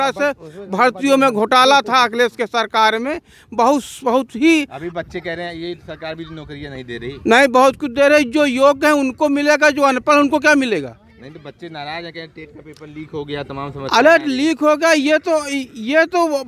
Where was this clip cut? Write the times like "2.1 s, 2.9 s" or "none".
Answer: none

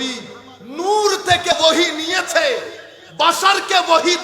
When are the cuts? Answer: 1.5 s

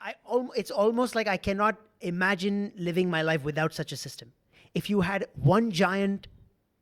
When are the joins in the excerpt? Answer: 4.5 s

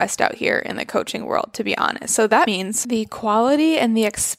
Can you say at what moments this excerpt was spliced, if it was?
2.6 s

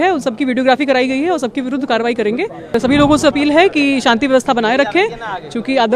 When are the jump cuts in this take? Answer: 2.8 s

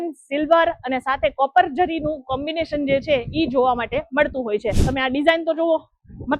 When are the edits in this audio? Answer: 4.8 s

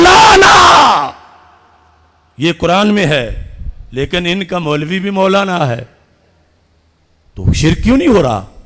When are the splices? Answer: none

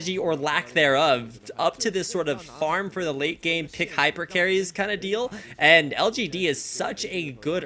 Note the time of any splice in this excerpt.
6.5 s

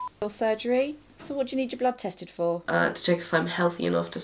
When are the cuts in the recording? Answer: 1.2 s, 2.6 s

